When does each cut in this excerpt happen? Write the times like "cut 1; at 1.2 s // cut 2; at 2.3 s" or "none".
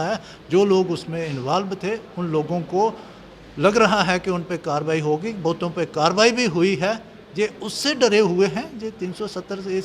none